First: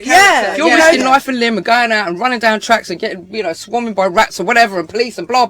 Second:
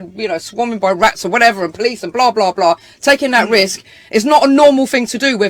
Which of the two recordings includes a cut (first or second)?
first